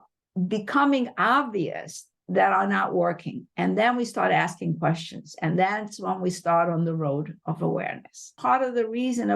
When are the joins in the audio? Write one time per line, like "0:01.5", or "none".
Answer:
0:08.3

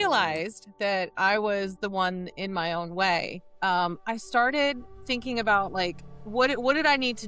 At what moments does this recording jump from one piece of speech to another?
0:06.1

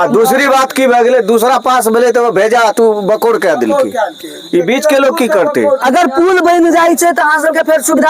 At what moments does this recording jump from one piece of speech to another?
0:05.8

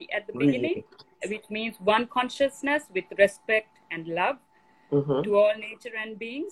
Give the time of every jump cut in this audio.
0:01.1

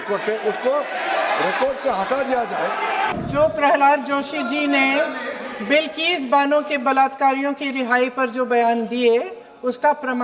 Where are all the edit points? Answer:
0:03.2

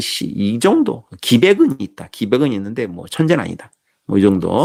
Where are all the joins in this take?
none

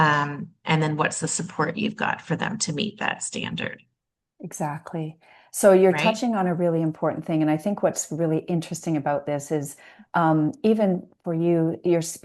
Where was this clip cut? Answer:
none

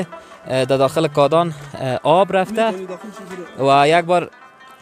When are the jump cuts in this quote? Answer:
none

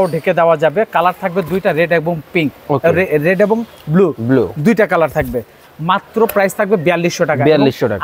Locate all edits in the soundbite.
none

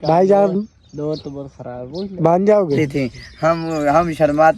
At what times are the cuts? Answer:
0:02.7

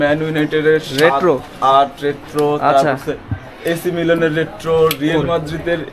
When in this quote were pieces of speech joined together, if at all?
none

